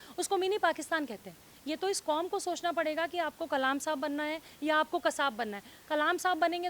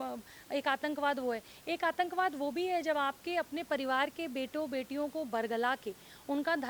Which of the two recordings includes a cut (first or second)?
first